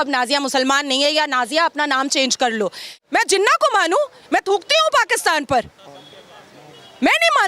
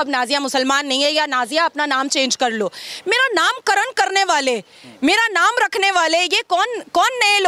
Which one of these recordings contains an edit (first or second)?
first